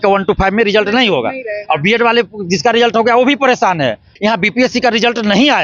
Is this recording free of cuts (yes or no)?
no